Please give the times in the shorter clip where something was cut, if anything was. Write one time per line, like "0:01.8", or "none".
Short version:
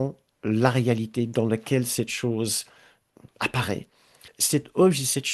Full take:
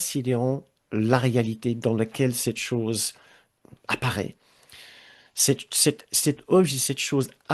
0:04.4